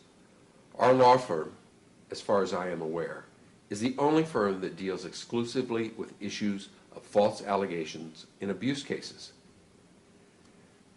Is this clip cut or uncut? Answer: cut